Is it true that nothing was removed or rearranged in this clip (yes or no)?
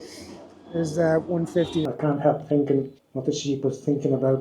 no